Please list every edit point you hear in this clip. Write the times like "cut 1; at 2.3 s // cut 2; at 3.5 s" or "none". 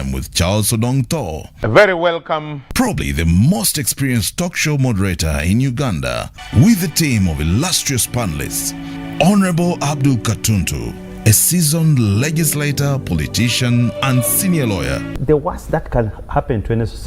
cut 1; at 3.0 s